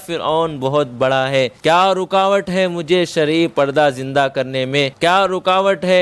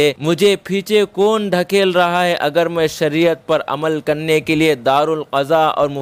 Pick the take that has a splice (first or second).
first